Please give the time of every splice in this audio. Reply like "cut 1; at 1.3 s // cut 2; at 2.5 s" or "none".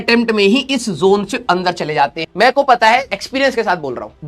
cut 1; at 2.2 s